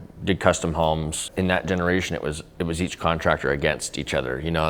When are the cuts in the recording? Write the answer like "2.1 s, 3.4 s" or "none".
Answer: 1.2 s

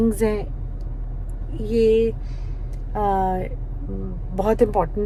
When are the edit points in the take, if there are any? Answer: none

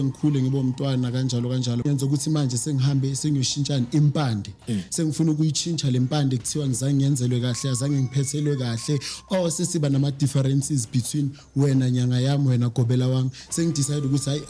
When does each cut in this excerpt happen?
1.9 s

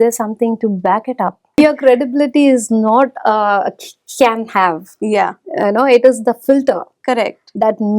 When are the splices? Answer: 1.4 s

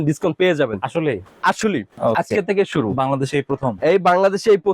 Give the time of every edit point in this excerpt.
1.9 s

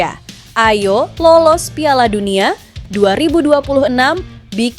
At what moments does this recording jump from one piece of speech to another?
none

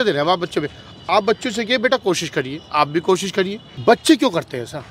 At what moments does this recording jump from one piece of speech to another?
3.6 s

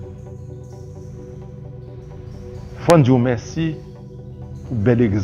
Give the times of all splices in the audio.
2.8 s

